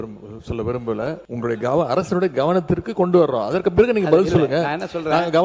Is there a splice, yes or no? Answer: yes